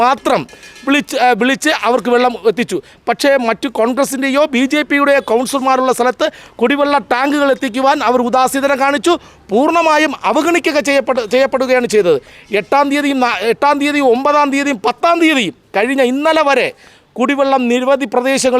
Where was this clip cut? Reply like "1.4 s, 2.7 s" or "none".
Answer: none